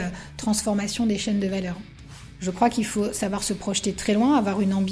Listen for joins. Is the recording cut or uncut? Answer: cut